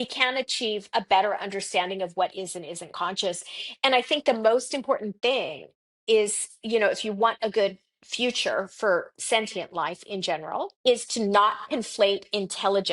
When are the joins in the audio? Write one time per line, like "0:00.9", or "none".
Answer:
0:10.7